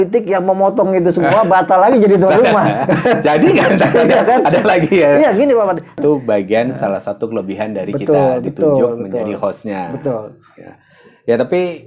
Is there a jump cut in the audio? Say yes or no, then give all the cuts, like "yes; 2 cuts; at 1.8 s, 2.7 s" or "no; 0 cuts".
yes; 1 cut; at 6.0 s